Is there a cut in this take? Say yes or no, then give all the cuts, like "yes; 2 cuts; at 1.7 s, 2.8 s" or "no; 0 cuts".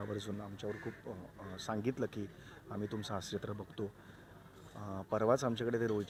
no; 0 cuts